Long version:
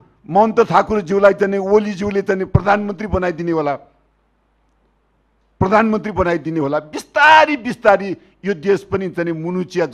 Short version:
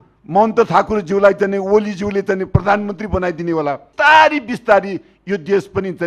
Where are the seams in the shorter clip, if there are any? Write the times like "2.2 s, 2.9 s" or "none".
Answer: 3.9 s

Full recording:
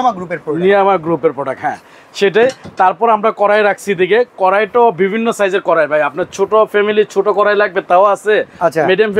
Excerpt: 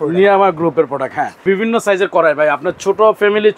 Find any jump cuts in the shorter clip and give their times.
1.4 s

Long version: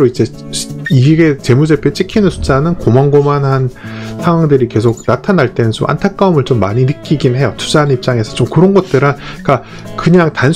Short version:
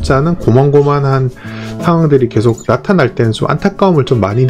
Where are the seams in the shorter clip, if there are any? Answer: none

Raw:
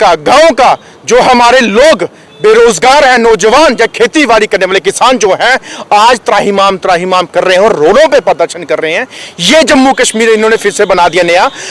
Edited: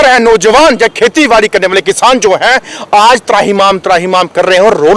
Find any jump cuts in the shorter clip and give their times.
none

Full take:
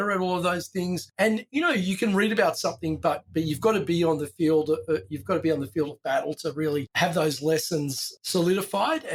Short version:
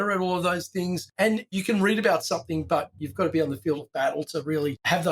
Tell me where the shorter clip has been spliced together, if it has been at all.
1.5 s, 2.9 s

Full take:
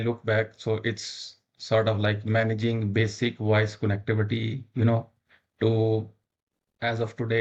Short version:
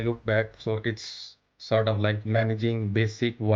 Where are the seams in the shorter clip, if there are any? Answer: none

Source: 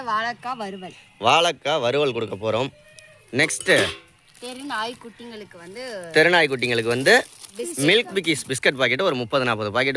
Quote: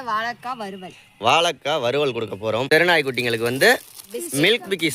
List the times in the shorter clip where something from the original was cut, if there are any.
2.7 s

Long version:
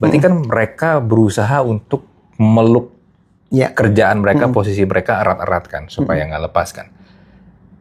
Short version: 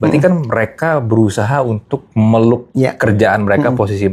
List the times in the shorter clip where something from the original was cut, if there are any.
2.0 s, 2.7 s

